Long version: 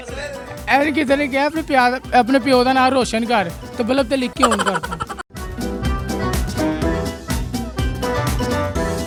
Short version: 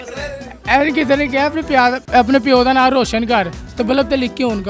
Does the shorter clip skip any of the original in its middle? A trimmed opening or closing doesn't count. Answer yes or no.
no